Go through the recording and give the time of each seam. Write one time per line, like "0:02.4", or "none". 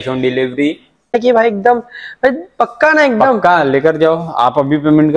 0:01.2